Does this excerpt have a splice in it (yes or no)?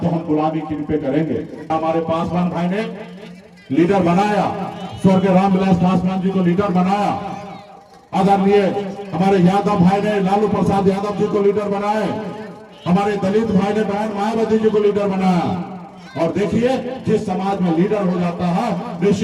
yes